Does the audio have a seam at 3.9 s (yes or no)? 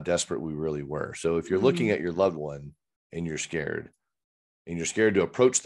no